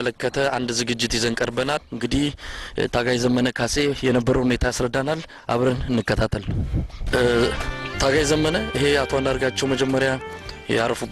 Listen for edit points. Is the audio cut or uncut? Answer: cut